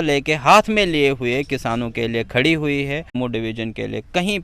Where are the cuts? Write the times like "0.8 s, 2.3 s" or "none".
3.1 s